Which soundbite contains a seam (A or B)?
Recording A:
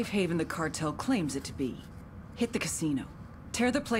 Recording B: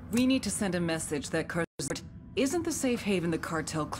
B